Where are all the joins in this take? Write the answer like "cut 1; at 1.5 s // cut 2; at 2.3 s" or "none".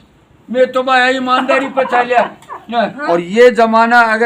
cut 1; at 3.0 s